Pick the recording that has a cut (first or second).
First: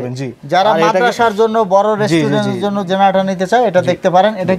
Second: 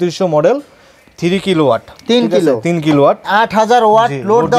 second